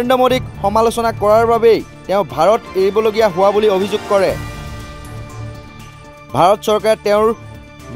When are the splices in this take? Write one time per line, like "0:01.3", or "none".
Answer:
0:04.4
0:06.3